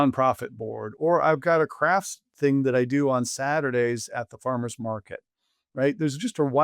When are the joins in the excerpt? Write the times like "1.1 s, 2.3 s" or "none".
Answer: 0.9 s